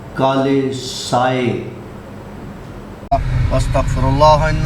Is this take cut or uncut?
cut